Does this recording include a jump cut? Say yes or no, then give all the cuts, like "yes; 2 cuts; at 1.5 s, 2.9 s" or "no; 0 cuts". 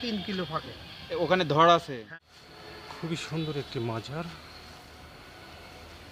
yes; 1 cut; at 2.0 s